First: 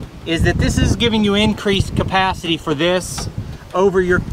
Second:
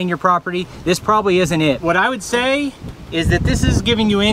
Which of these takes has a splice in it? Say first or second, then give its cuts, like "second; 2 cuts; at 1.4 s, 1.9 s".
second; 1 cut; at 1.8 s